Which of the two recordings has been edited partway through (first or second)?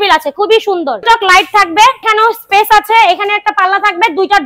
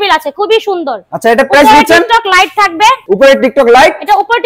first